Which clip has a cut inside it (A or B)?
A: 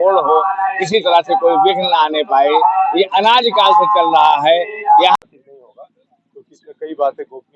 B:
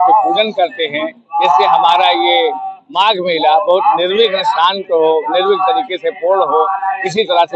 A